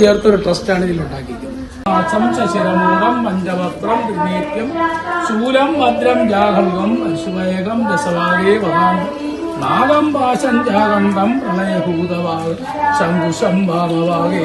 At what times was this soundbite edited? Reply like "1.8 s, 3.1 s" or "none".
1.8 s